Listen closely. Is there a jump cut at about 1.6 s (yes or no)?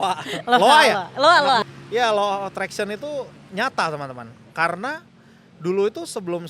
yes